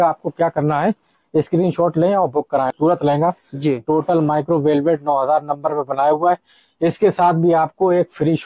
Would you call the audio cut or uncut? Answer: cut